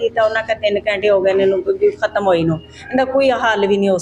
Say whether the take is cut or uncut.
uncut